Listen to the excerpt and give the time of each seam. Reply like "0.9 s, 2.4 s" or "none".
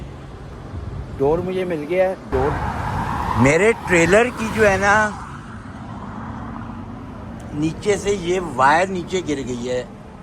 2.5 s